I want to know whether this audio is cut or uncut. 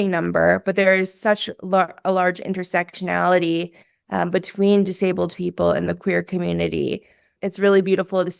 cut